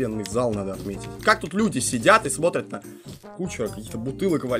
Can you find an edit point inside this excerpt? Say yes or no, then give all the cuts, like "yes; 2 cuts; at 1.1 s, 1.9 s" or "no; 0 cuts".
yes; 1 cut; at 1.1 s